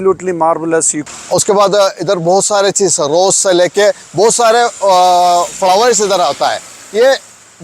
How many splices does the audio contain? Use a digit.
1